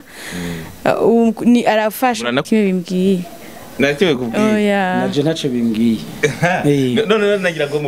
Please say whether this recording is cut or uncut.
cut